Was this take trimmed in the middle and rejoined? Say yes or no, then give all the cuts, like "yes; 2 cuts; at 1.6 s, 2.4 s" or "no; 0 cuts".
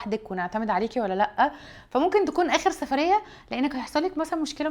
no; 0 cuts